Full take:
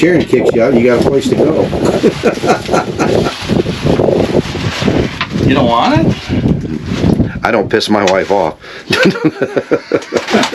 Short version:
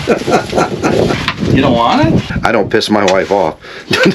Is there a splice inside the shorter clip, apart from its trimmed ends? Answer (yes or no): yes